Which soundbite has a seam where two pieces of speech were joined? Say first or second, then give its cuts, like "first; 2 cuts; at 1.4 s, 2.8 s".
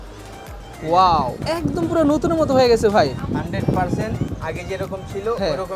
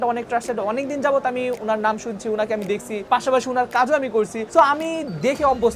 first; 1 cut; at 1.4 s